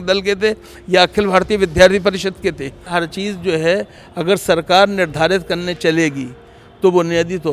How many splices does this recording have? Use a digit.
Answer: 1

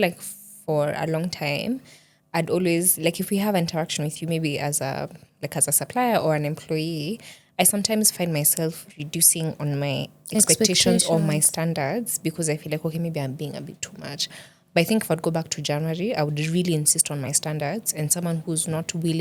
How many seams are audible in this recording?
0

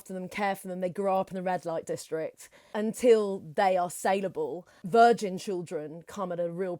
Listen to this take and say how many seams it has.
1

